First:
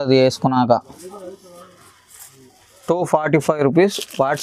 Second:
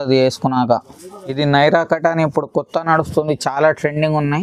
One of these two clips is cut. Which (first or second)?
second